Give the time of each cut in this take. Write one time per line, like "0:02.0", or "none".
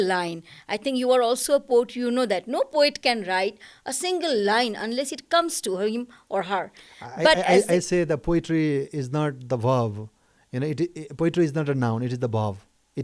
none